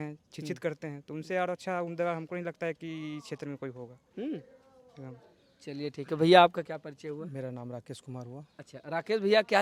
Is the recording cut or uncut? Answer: uncut